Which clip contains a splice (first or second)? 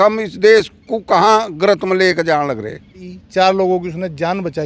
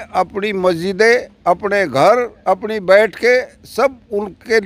first